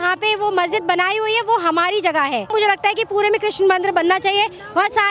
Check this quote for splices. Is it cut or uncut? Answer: cut